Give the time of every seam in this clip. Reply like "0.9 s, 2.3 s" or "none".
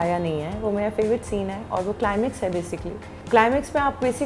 3.1 s